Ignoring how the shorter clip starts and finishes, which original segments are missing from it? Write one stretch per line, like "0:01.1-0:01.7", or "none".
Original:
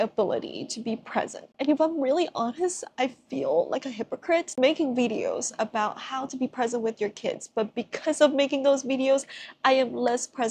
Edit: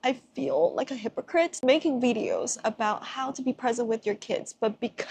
none